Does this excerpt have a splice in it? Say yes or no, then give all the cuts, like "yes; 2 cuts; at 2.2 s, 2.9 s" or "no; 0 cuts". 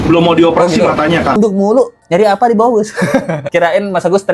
yes; 2 cuts; at 1.4 s, 3.4 s